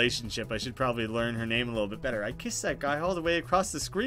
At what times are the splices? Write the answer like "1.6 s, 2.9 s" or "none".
none